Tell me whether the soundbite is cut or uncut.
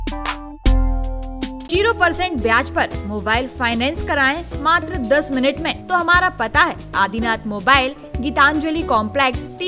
cut